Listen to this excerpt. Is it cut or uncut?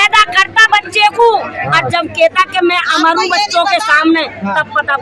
uncut